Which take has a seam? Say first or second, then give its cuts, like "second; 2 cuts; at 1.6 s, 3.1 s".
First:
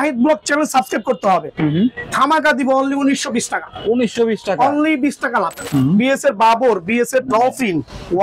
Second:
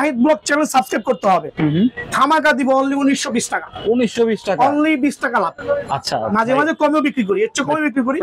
first; 1 cut; at 5.6 s